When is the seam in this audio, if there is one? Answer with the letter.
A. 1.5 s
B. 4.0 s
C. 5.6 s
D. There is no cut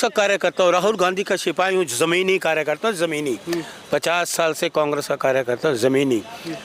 D